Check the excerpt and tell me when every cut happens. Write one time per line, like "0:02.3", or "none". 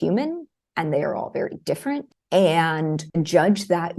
0:02.1
0:03.0